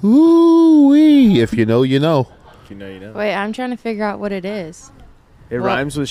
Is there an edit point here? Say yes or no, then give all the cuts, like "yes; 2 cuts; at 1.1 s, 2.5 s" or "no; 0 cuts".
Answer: no; 0 cuts